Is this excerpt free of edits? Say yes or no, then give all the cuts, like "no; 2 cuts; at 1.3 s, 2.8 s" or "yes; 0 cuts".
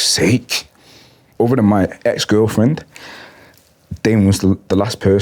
no; 1 cut; at 1.3 s